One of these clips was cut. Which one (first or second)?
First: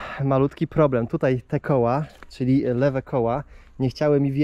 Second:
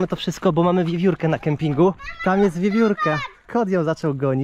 second